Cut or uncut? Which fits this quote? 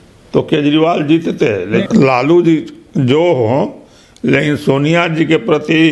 cut